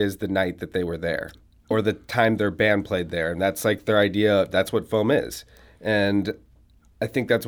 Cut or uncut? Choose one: cut